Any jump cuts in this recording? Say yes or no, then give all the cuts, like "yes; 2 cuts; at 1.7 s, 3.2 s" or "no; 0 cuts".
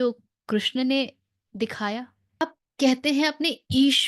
yes; 1 cut; at 2.4 s